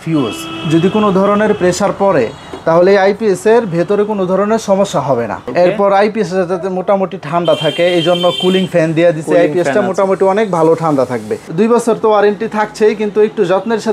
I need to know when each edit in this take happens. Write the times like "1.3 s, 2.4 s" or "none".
5.4 s, 11.5 s

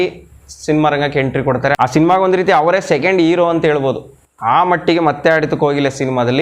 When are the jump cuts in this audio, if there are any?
1.8 s

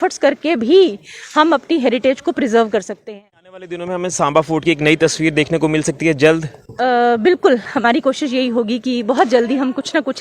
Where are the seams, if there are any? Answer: 2.9 s

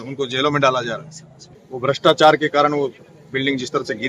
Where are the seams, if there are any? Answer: 1.5 s

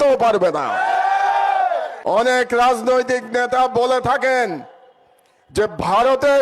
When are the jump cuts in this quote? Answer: 1.9 s

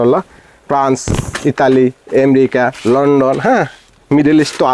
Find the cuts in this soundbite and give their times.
none

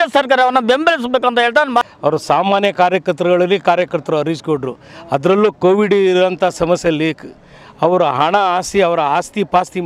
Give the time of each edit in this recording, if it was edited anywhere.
1.9 s

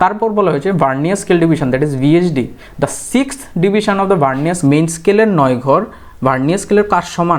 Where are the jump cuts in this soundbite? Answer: 4.6 s

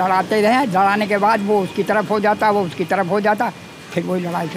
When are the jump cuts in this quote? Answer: none

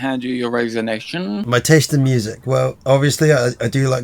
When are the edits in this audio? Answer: 1.4 s, 2.8 s

